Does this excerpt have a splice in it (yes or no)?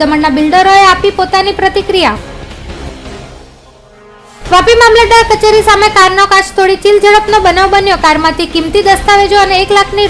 no